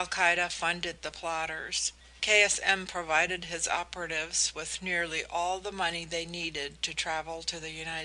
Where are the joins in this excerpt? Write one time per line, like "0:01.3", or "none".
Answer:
0:05.6